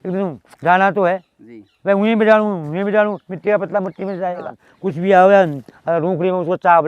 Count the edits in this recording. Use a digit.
1